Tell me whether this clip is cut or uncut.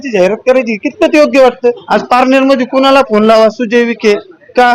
cut